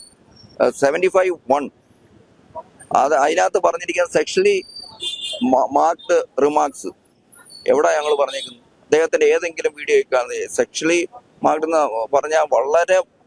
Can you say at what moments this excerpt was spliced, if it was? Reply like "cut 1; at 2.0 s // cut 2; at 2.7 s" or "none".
none